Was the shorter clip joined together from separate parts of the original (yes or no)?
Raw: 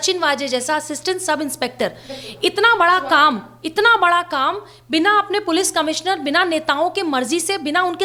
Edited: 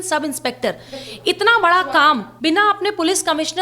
yes